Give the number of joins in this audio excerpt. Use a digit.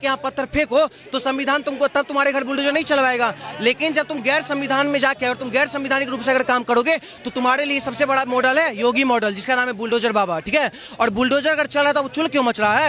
0